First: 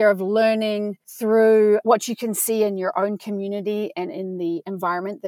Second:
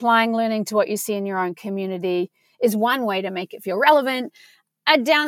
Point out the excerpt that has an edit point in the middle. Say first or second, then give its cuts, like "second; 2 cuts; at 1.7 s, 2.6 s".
first; 1 cut; at 1.0 s